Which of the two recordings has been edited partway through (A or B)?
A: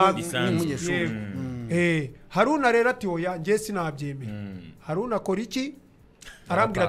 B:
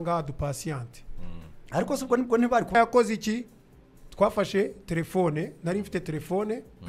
B